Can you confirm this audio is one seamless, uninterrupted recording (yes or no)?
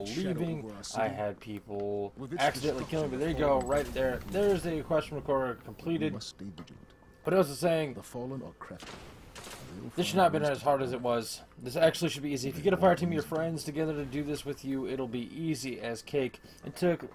no